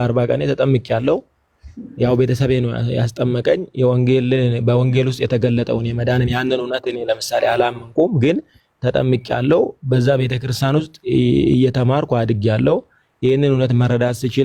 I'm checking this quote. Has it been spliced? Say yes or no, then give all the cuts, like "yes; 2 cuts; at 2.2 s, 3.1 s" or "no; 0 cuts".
no; 0 cuts